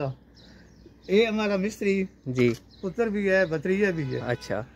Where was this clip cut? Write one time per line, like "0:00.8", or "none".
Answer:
none